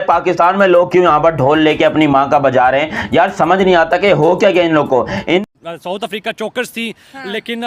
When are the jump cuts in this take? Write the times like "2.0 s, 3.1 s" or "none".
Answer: 5.4 s